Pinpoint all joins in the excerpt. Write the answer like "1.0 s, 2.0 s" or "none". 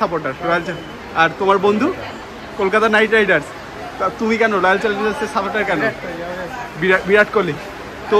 none